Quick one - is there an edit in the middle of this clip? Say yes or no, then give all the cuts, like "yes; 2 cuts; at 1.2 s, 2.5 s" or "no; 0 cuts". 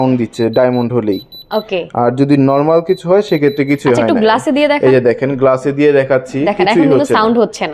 no; 0 cuts